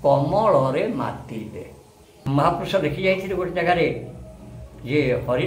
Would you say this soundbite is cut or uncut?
cut